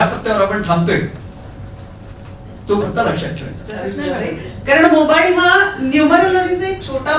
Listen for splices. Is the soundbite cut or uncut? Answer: cut